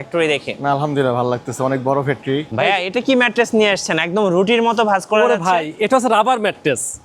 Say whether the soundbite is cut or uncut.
cut